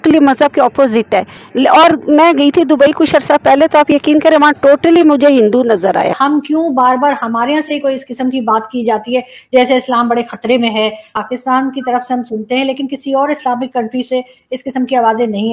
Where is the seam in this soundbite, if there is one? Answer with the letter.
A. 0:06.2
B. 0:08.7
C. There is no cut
A